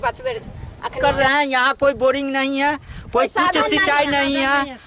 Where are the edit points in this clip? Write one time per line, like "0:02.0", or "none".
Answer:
0:01.0